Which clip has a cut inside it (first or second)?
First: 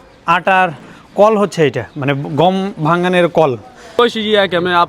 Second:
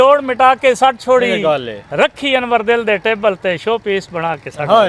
first